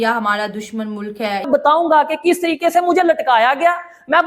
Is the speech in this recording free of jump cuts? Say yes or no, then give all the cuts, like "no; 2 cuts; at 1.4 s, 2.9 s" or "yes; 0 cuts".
no; 1 cut; at 1.4 s